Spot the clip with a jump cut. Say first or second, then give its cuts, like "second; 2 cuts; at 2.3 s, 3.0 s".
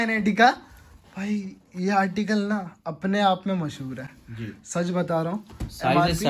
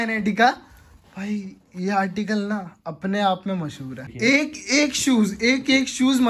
second; 1 cut; at 4.1 s